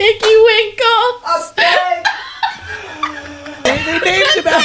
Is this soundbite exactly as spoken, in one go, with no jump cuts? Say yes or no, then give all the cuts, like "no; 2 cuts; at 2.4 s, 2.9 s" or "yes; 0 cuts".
no; 1 cut; at 3.7 s